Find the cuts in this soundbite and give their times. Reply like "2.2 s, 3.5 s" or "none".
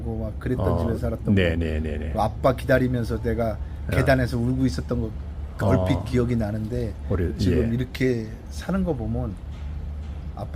none